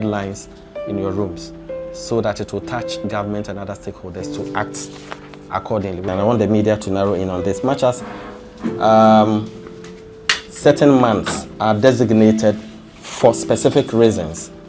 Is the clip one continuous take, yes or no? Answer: no